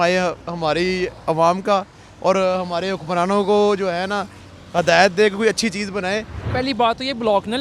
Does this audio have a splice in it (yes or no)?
yes